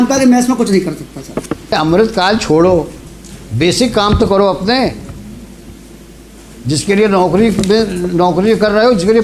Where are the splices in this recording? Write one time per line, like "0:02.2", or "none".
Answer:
0:01.7

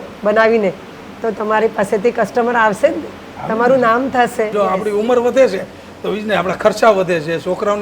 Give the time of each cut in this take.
0:04.5

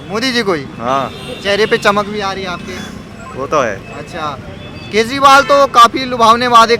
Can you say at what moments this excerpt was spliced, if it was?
none

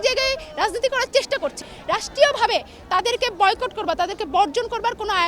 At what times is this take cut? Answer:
0:01.6

